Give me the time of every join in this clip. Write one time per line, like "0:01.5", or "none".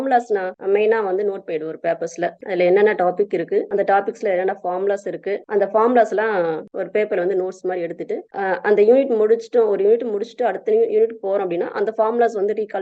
none

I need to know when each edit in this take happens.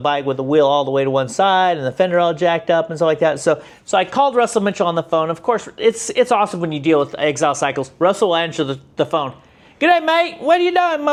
none

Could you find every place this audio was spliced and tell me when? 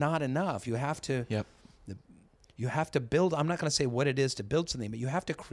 none

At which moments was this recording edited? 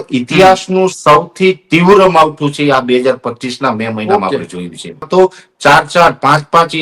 0:05.1

